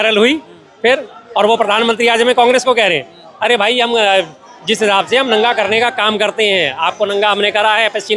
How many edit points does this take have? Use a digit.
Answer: 0